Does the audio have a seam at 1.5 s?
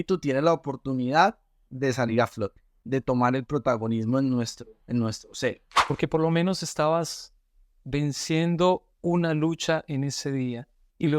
no; 2 cuts; at 2.8 s, 5.7 s

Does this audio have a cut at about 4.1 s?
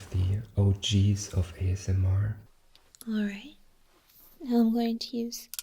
no; 1 cut; at 2.4 s

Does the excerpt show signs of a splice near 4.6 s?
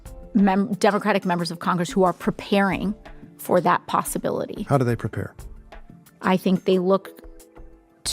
yes; 1 cut; at 4.6 s

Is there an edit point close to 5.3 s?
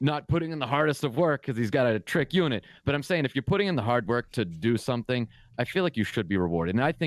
no; 0 cuts

